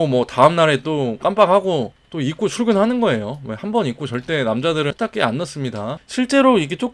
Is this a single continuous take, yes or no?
no